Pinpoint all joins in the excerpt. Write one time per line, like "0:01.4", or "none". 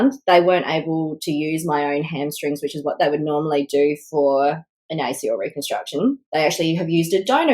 0:06.2